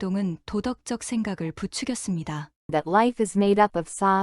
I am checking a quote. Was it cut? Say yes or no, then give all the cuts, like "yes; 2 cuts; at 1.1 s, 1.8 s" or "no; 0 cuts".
yes; 1 cut; at 2.5 s